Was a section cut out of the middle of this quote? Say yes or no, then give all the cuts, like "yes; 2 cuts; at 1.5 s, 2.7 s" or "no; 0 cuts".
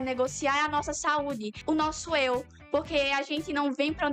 yes; 1 cut; at 1.5 s